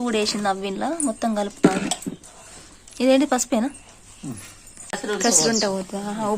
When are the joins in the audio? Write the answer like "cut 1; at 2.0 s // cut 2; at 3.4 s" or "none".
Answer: cut 1; at 5.0 s